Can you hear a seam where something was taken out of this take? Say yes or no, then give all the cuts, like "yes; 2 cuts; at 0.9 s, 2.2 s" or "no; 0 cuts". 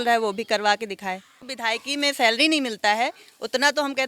yes; 1 cut; at 1.4 s